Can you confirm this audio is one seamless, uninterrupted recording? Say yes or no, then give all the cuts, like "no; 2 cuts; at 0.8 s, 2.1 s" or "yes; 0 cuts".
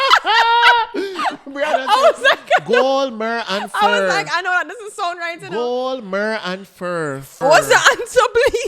no; 1 cut; at 7.3 s